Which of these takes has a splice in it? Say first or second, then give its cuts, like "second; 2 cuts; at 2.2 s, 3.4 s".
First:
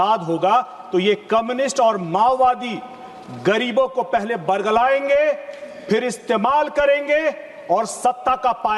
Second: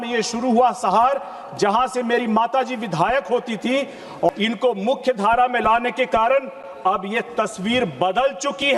second; 1 cut; at 4.3 s